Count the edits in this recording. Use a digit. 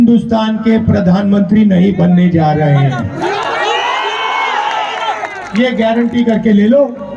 0